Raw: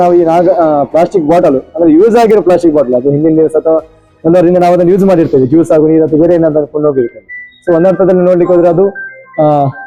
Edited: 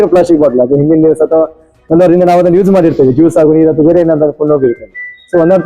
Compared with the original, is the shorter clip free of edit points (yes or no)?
yes